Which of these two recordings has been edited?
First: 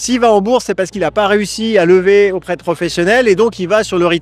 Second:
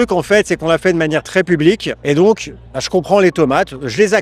second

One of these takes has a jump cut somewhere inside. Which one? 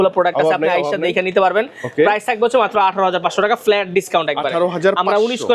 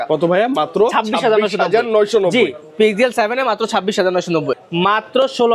second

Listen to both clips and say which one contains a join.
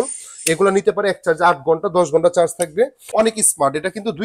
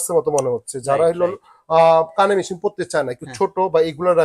first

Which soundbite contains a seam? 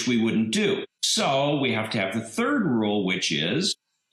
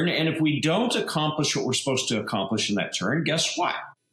first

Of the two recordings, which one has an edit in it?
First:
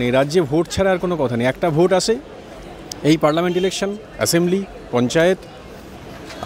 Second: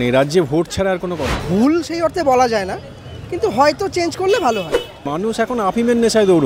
second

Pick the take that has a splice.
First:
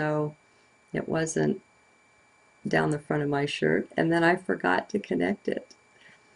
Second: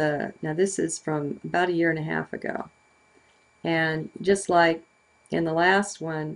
second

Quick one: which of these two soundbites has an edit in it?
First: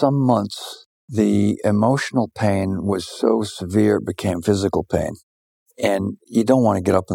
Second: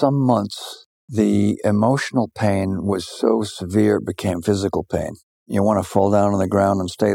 second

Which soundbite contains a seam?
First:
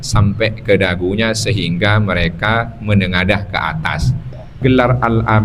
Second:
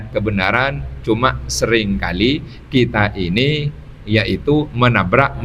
first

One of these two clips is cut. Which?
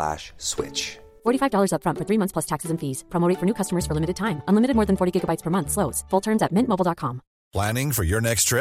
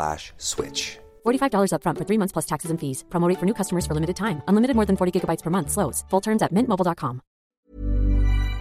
second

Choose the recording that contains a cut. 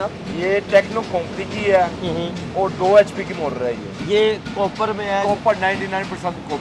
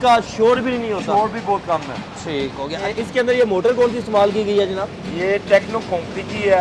second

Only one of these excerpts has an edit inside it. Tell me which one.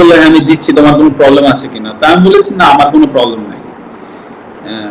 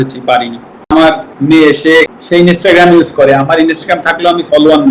second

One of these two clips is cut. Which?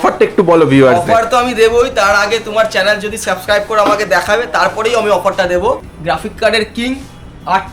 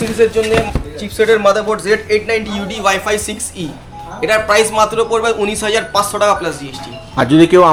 first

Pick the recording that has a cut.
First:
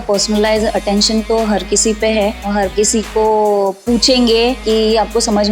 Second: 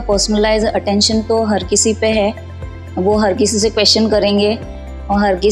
first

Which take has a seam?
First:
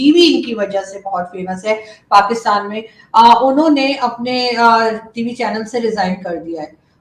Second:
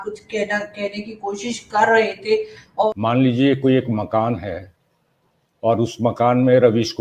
second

